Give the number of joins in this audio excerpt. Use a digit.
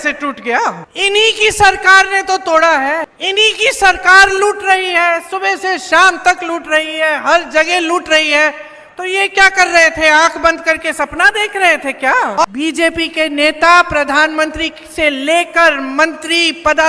3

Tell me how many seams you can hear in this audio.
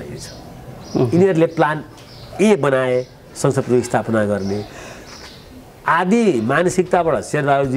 0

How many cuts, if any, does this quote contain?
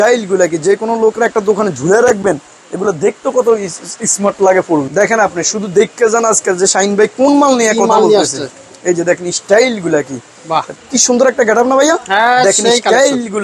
2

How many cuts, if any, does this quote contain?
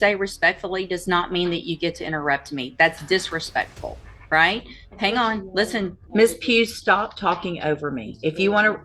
1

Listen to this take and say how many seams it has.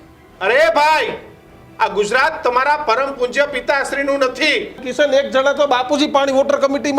1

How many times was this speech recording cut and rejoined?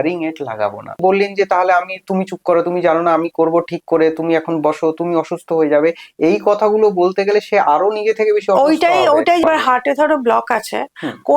2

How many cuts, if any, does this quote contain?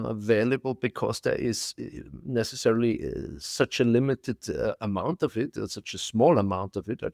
0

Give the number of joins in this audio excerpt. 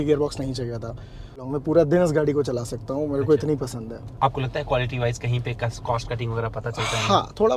2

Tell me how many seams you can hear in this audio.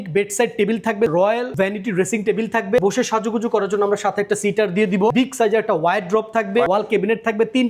4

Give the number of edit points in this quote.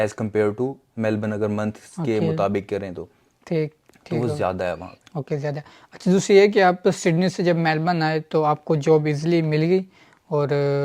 0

